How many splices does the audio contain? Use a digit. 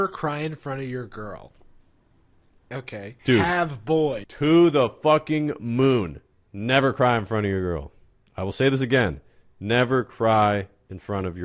0